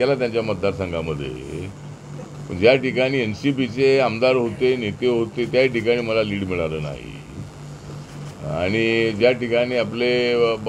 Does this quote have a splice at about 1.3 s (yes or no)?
no